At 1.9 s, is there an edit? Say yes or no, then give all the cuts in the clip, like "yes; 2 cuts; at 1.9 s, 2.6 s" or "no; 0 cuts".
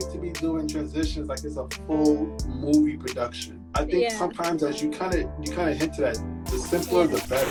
no; 0 cuts